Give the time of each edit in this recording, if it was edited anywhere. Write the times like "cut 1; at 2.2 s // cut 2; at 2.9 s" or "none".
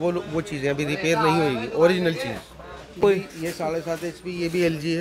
cut 1; at 3.0 s